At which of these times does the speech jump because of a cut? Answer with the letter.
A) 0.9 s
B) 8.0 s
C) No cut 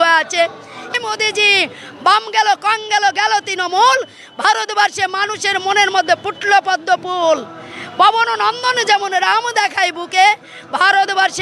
A